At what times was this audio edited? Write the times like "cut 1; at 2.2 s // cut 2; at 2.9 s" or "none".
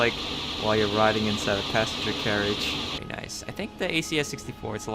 cut 1; at 3.0 s